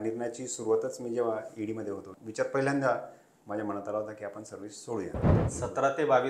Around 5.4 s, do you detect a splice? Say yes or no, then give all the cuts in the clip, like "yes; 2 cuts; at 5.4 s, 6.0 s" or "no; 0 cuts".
yes; 2 cuts; at 2.1 s, 5.4 s